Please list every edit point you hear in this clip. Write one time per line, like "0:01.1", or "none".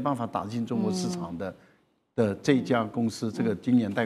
none